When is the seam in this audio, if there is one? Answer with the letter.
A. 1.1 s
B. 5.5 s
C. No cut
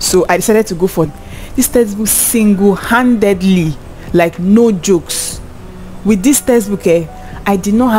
A